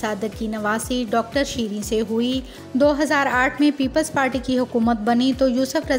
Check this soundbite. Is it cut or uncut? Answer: cut